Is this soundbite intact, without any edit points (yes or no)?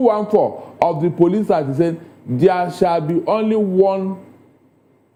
yes